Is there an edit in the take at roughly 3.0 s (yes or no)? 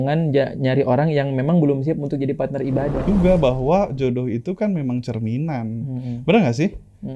yes